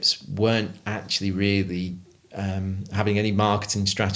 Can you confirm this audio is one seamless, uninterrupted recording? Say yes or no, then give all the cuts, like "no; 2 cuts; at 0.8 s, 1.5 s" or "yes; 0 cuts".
yes; 0 cuts